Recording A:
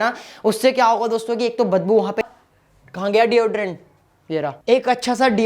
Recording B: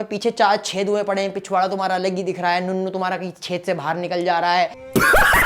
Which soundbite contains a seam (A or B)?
A